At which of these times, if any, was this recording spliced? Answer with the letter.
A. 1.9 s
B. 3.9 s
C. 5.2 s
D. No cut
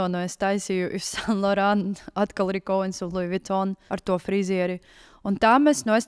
B